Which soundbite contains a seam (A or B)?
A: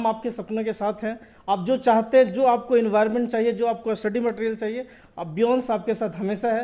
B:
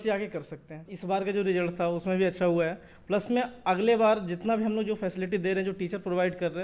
B